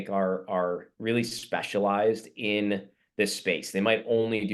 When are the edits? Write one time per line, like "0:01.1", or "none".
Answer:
none